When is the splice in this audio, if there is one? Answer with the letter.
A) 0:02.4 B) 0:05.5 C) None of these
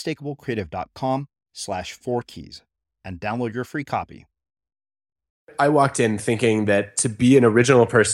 B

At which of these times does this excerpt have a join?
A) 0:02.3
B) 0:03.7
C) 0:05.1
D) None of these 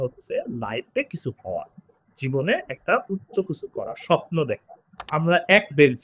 C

